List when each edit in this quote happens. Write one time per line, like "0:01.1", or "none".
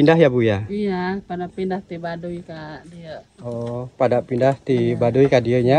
none